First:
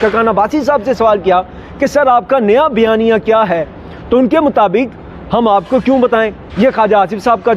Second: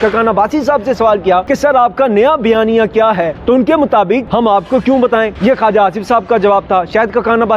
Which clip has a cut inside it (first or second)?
second